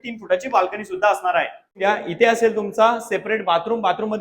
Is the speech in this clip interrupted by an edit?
yes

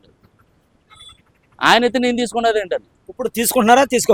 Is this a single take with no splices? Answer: yes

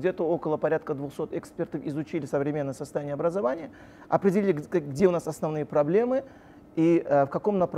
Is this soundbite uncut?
yes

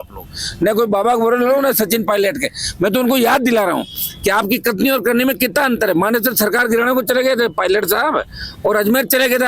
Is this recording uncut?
yes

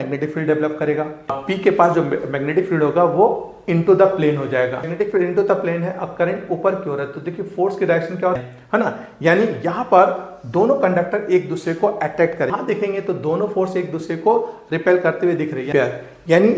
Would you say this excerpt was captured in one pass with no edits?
no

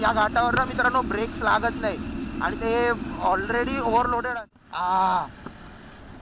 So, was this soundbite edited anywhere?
yes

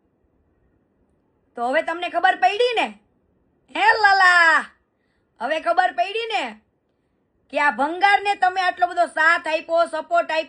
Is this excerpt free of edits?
yes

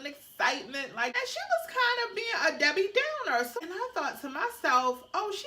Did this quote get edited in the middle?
yes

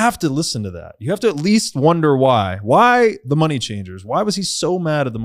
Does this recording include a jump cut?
no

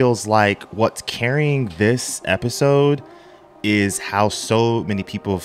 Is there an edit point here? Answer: no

